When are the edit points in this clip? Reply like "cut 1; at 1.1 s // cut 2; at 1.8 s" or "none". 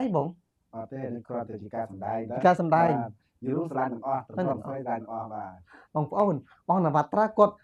none

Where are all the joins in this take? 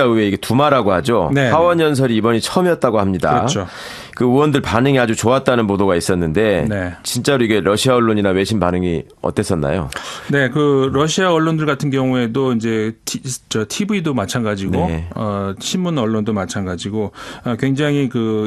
none

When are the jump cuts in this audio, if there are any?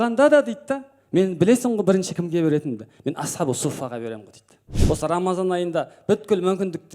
cut 1; at 4.7 s

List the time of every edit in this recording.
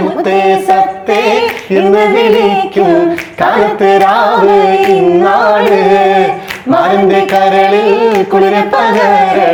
none

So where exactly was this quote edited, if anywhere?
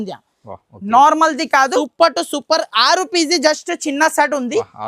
cut 1; at 1.8 s

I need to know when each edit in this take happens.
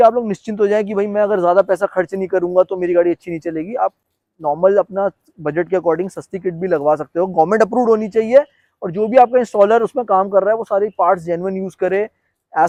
none

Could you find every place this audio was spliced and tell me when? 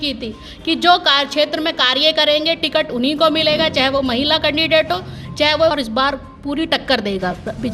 cut 1; at 5.7 s

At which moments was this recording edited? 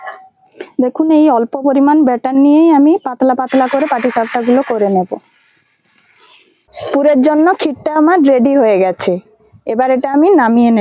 cut 1; at 6.7 s

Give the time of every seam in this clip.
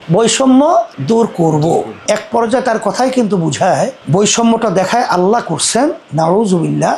cut 1; at 2.0 s // cut 2; at 4.0 s

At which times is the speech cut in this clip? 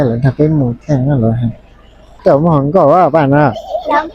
cut 1; at 2.0 s

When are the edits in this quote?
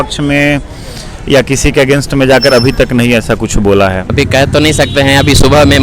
cut 1; at 4.1 s

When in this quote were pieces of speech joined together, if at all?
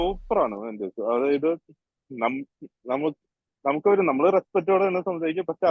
none

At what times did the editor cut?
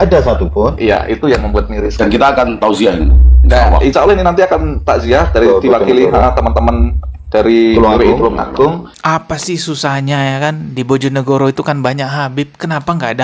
cut 1; at 9.0 s

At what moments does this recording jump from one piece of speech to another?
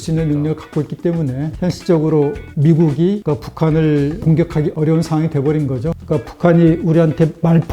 cut 1; at 6.0 s

